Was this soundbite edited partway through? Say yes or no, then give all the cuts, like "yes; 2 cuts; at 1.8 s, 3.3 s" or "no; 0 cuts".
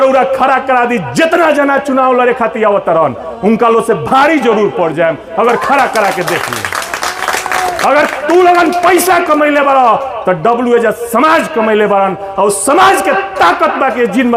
no; 0 cuts